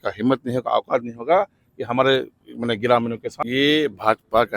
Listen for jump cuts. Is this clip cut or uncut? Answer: cut